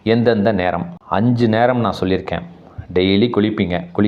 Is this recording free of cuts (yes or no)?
no